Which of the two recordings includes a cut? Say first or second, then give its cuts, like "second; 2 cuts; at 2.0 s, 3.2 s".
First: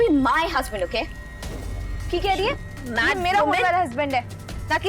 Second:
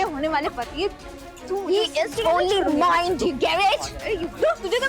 first; 1 cut; at 2.9 s